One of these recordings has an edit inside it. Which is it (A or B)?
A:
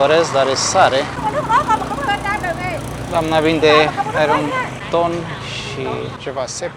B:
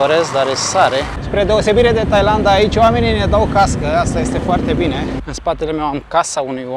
B